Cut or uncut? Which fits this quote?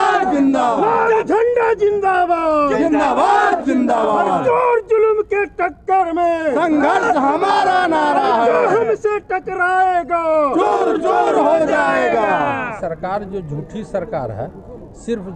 cut